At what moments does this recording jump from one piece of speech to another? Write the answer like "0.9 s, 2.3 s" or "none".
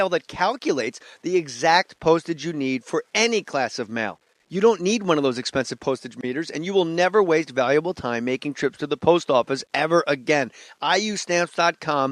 9.6 s